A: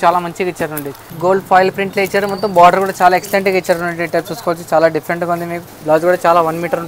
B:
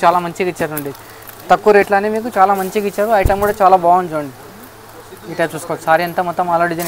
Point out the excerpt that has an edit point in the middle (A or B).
A